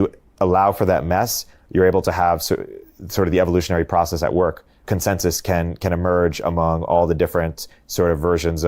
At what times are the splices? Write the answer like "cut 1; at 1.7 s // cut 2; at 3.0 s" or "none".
cut 1; at 4.8 s